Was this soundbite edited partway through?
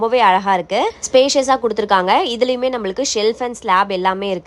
no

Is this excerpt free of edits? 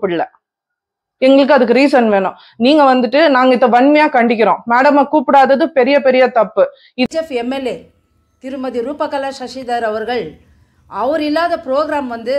no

